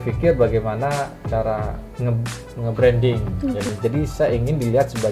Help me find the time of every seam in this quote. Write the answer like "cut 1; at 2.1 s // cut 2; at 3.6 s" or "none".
cut 1; at 3.7 s